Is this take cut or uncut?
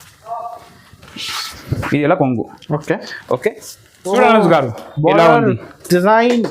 cut